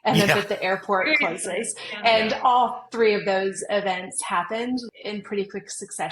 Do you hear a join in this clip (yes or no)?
yes